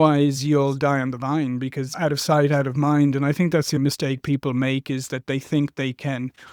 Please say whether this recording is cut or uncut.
cut